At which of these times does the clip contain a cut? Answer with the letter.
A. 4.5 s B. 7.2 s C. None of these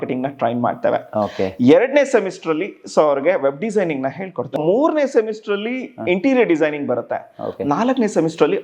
A